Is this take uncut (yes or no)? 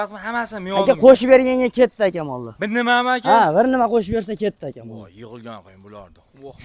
yes